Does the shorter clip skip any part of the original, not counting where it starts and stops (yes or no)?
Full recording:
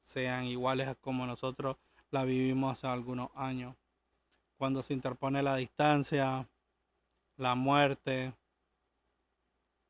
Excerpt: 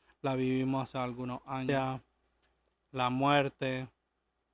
yes